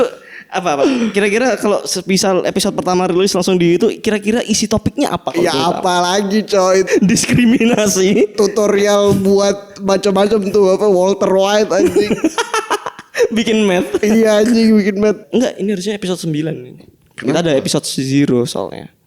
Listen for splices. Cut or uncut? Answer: cut